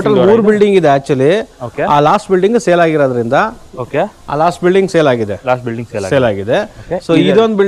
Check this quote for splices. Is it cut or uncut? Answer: uncut